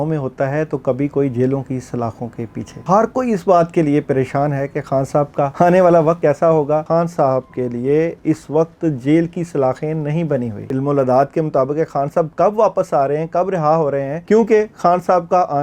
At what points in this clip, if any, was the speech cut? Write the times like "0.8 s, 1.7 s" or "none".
2.8 s, 5.5 s, 6.3 s, 10.6 s, 14.2 s